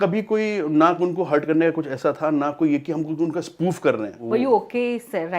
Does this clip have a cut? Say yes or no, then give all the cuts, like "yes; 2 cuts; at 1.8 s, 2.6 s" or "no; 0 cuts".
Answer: yes; 1 cut; at 4.2 s